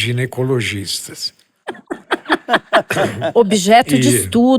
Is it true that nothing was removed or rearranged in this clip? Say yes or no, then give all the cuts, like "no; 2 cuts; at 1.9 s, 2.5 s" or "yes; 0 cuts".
yes; 0 cuts